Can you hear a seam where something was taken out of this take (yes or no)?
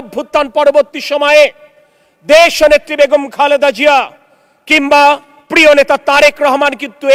no